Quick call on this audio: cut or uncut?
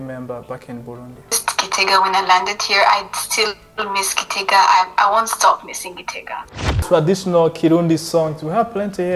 cut